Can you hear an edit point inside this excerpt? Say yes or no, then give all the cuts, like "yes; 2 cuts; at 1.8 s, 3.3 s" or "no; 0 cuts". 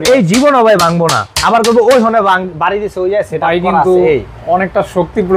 no; 0 cuts